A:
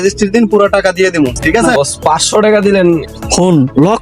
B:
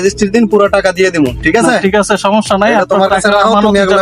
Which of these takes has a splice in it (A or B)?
A